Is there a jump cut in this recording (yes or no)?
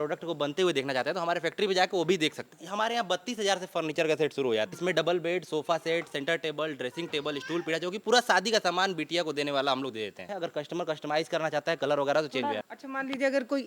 yes